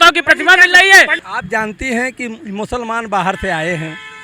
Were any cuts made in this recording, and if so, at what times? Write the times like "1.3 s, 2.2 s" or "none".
1.2 s

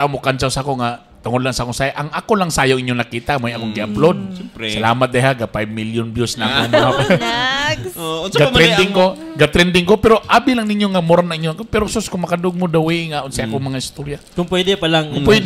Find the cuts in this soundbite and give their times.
none

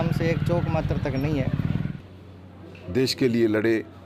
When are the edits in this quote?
1.9 s

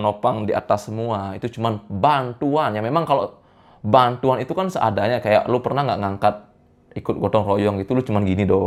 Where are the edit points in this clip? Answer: none

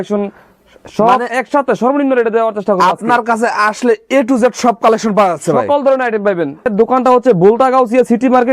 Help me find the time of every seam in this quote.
6.7 s

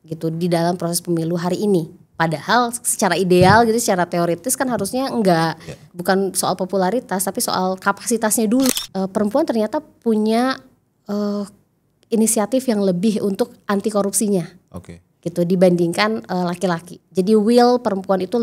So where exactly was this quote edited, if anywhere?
8.7 s

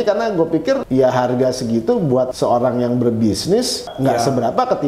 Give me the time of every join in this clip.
0.8 s, 2.3 s, 3.8 s

